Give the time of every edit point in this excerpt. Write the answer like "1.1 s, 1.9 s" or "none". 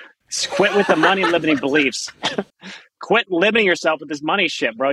none